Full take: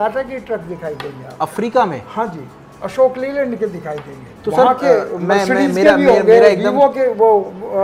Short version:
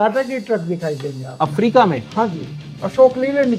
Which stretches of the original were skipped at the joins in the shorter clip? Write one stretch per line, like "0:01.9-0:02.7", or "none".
none